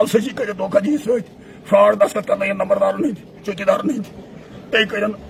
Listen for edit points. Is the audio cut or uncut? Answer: uncut